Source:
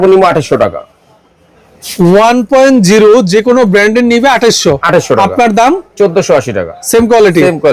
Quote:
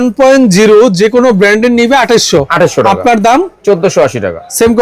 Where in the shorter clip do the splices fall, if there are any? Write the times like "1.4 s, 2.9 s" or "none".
none